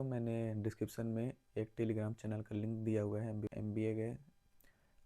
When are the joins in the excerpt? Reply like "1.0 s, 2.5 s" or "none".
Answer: 3.5 s